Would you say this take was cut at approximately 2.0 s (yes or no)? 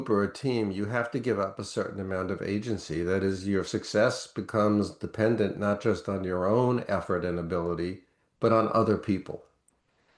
no